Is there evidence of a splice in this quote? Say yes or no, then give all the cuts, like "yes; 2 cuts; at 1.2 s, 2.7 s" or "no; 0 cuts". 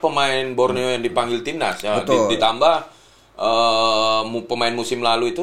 no; 0 cuts